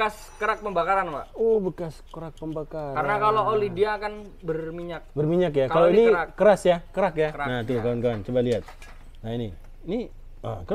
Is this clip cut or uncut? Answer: uncut